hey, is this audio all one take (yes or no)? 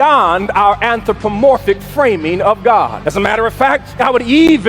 no